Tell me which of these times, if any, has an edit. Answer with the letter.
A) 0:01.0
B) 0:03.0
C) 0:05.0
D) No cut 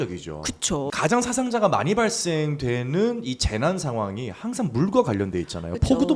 A